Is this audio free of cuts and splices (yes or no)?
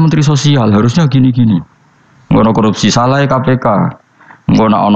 yes